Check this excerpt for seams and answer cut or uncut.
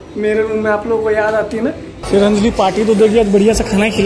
cut